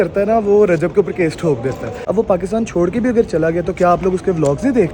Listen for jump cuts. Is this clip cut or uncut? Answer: cut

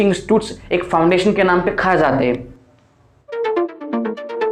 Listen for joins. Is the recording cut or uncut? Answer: uncut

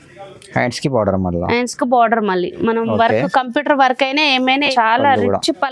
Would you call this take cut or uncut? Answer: cut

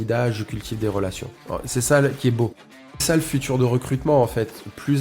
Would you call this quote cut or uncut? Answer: cut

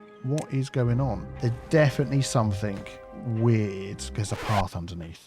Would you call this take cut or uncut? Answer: cut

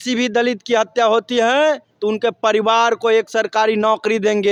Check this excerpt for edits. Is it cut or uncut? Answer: uncut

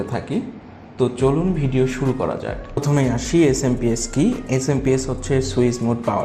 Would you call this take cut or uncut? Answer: cut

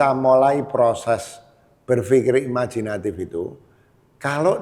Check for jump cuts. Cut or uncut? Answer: uncut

